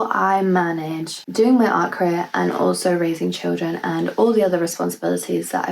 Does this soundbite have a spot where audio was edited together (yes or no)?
yes